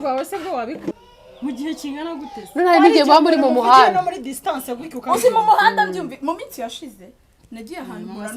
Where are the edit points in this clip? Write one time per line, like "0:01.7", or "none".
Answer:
0:00.9